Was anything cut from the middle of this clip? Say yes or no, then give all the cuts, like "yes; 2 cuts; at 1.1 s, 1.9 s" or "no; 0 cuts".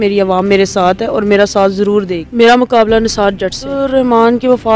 yes; 2 cuts; at 2.2 s, 3.8 s